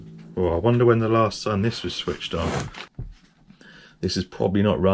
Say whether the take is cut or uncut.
cut